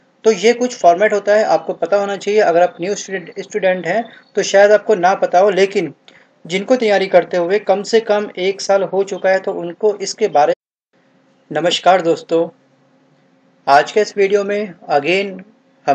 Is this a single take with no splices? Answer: yes; 0 cuts

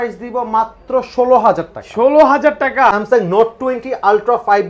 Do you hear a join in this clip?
yes; 1 cut; at 2.9 s

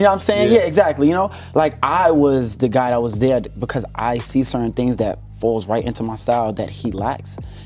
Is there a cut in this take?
no; 0 cuts

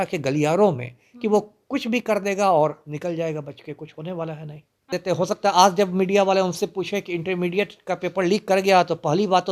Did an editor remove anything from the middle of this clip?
yes; 1 cut; at 4.9 s

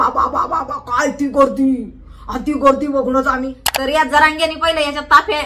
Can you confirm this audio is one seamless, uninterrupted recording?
no; 1 cut; at 3.6 s

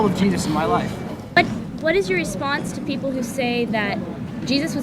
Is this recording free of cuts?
no; 1 cut; at 1.4 s

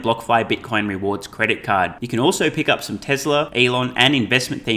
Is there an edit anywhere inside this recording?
yes; 1 cut; at 3.5 s

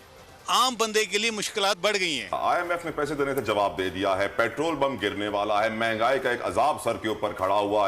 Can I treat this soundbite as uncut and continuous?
no; 1 cut; at 2.2 s

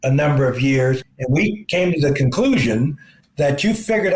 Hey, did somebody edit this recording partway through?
yes; 1 cut; at 1.0 s

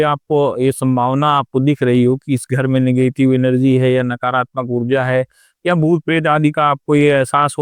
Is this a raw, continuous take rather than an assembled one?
yes; 0 cuts

